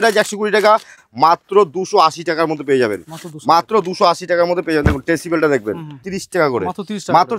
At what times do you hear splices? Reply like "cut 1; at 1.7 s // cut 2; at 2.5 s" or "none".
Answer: cut 1; at 0.9 s // cut 2; at 6.0 s

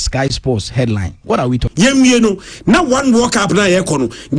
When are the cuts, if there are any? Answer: cut 1; at 1.7 s

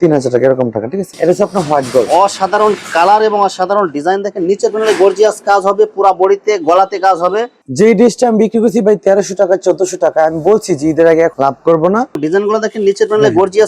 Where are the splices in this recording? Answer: cut 1; at 1.0 s // cut 2; at 7.6 s // cut 3; at 12.2 s

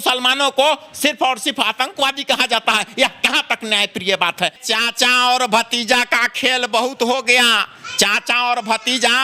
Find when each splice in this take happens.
cut 1; at 4.6 s

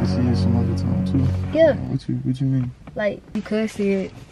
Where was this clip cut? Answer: cut 1; at 3.3 s

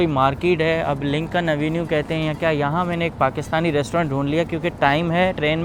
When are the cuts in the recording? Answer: none

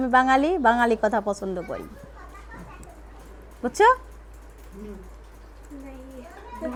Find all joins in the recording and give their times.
none

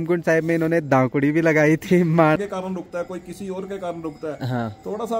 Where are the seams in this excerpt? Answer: cut 1; at 2.4 s

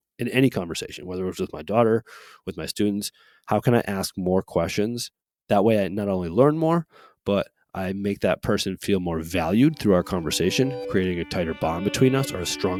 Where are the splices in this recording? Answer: none

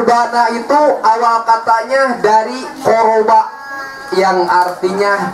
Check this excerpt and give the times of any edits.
none

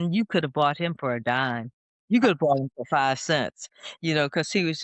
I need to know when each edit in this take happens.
none

